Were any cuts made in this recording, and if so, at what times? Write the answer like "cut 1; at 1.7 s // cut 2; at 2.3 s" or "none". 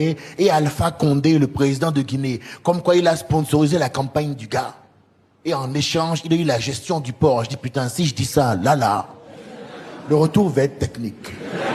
none